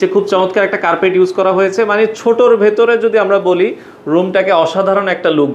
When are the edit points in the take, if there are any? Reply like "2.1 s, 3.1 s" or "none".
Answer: none